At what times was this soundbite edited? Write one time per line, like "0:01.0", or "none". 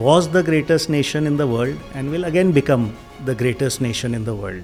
none

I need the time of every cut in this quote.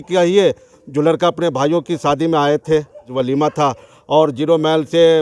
0:03.1

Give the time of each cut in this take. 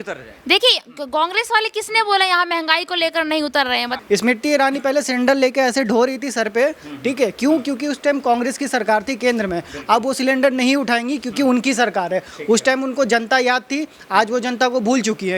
0:03.9

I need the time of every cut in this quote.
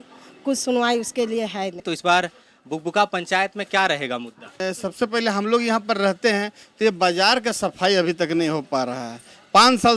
0:01.8
0:04.6

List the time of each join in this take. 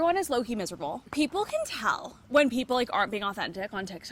0:01.0

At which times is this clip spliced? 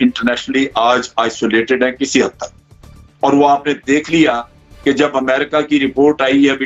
none

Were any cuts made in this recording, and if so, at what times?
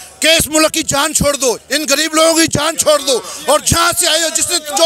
none

